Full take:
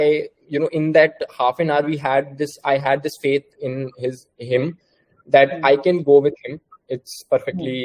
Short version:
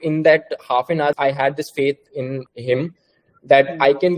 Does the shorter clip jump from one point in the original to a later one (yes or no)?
yes